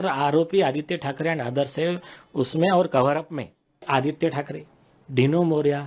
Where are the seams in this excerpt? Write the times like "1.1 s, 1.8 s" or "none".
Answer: 3.8 s